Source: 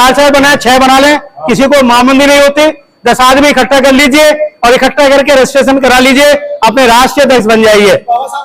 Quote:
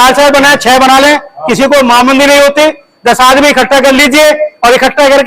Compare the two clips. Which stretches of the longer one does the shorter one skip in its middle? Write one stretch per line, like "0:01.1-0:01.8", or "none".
none